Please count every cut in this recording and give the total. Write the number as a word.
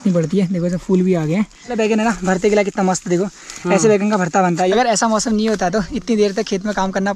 two